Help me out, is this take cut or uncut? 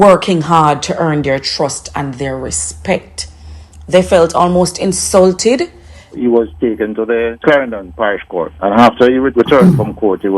cut